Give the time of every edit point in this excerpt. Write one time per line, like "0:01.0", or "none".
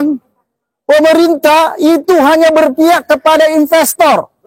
none